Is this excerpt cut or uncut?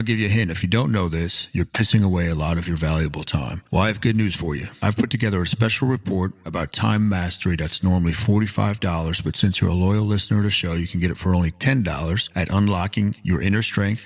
uncut